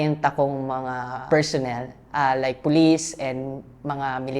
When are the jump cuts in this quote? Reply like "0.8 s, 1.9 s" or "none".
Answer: 1.2 s